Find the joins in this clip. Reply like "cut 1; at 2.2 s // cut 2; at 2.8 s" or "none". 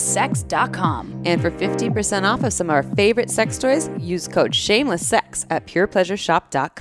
none